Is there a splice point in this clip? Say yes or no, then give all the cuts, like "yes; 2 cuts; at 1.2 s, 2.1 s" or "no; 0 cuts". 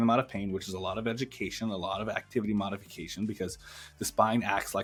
no; 0 cuts